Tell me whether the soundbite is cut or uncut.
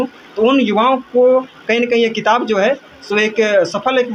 uncut